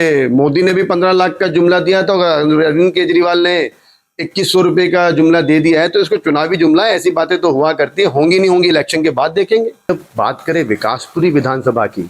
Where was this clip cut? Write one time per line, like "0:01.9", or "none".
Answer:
0:09.8